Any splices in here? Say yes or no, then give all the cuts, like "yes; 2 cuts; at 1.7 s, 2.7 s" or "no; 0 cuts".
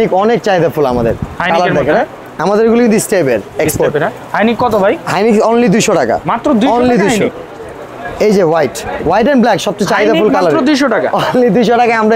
no; 0 cuts